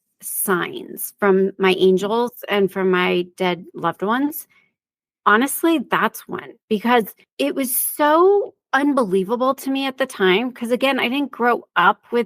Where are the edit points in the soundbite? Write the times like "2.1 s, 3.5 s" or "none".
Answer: 7.2 s, 8.6 s